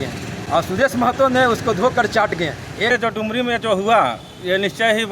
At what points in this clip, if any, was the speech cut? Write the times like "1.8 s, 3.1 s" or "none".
2.9 s

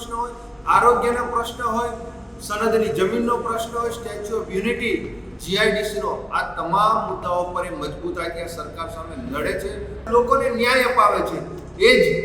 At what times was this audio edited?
10.0 s

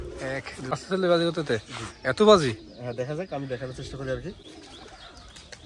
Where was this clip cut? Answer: 0.7 s, 4.5 s

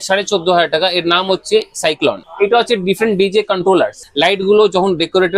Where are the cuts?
2.2 s, 4.0 s

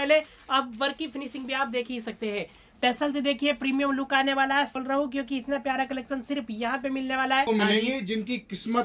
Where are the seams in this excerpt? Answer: 4.7 s, 7.5 s

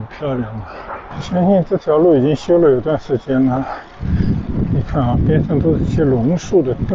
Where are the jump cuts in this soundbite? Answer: 1.1 s

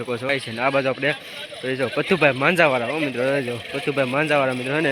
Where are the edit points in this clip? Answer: none

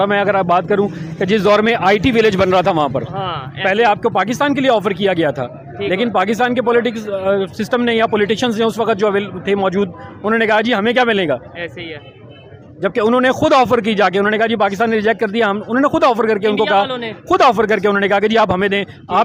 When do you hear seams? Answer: none

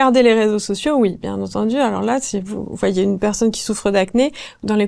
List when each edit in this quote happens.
none

